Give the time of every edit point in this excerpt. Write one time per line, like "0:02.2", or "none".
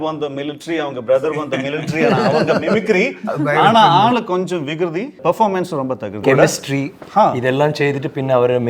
0:05.2
0:06.2